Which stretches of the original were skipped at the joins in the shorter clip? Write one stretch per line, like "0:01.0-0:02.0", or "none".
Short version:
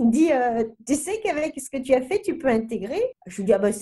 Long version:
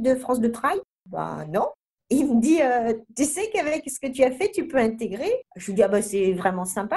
none